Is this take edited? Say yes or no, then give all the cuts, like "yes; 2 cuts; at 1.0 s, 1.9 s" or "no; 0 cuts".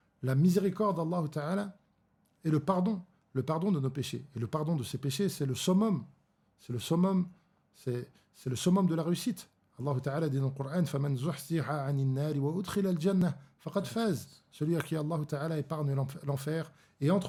no; 0 cuts